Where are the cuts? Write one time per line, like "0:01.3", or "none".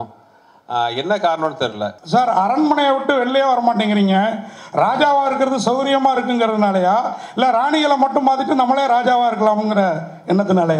0:02.0